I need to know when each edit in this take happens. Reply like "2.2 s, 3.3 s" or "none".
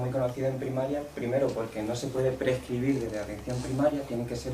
1.7 s